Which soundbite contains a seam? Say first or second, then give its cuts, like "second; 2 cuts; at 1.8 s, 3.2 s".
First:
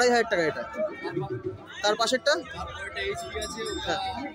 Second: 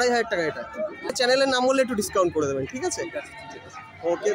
second; 1 cut; at 1.1 s